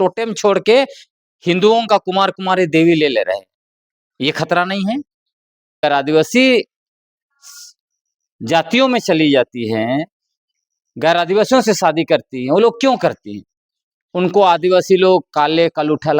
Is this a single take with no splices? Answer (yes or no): no